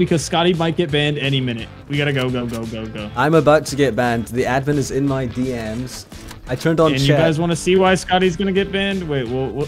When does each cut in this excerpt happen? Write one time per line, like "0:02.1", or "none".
none